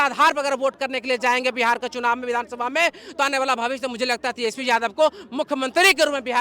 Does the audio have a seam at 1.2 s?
no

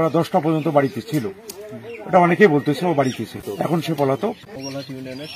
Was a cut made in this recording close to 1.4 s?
no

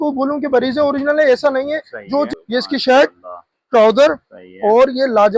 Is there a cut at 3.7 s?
no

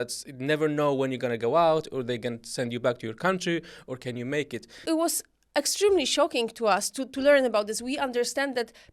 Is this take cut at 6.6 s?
no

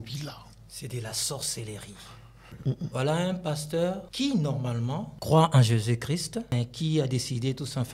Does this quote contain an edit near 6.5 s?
yes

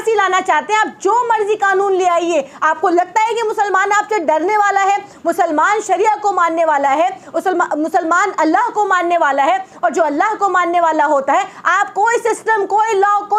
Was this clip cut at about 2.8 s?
no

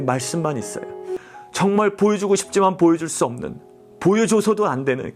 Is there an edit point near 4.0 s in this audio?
no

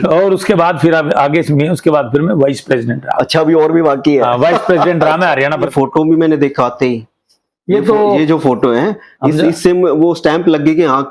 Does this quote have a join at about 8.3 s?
no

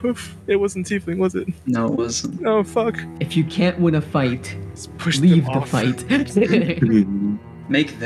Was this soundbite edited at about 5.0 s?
no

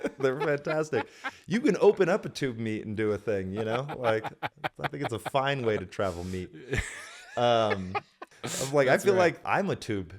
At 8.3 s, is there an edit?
yes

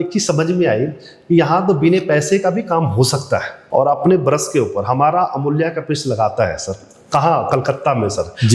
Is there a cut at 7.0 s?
no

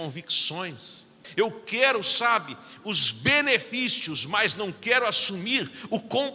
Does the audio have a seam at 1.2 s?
yes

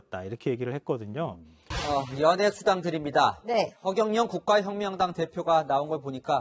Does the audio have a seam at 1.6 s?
yes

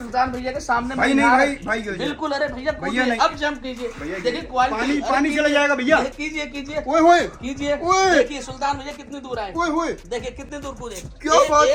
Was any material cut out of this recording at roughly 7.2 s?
no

